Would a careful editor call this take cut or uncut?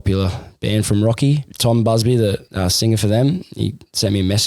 cut